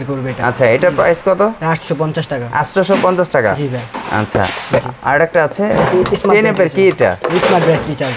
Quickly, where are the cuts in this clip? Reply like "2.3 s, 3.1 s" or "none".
none